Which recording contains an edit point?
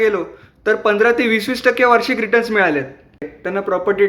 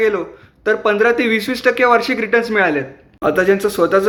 first; 1 cut; at 3.2 s

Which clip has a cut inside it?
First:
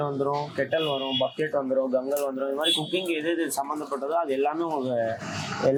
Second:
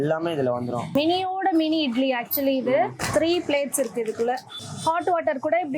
second; 2 cuts; at 0.9 s, 4.5 s

